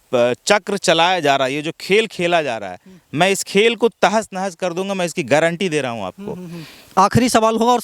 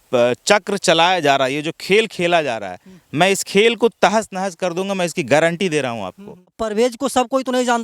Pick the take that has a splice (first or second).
second